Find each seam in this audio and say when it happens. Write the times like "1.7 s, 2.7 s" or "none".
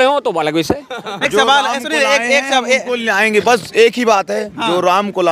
1.2 s